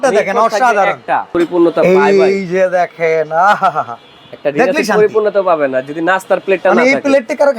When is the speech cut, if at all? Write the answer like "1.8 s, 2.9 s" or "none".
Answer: 1.3 s

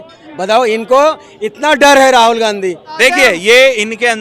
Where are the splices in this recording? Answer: 3.0 s

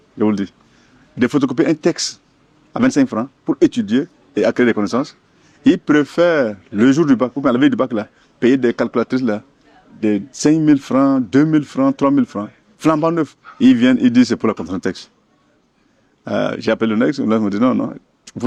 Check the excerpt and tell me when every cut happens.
none

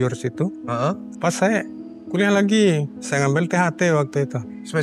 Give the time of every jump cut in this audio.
1.1 s

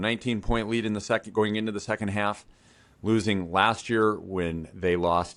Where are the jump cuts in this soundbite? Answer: none

